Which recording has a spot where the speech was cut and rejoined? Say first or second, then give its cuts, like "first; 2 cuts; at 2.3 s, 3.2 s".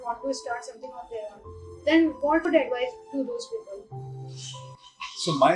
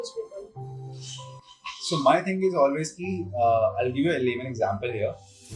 first; 1 cut; at 2.5 s